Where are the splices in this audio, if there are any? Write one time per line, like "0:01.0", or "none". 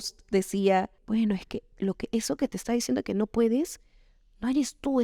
0:01.0